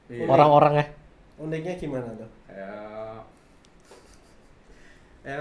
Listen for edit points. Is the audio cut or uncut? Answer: uncut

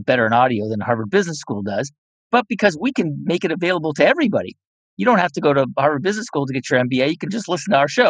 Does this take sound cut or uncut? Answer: uncut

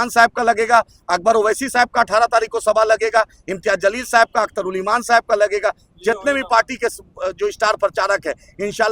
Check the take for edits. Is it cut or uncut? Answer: uncut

